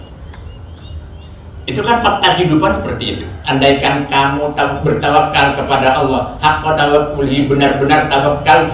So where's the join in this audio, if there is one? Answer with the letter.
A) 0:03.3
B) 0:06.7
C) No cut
A